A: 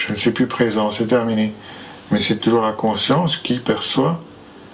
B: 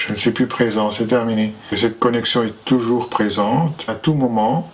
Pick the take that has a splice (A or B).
B